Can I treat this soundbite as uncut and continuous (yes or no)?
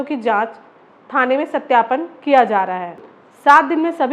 no